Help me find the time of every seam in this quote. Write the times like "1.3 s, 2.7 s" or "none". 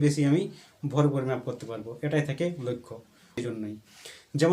3.4 s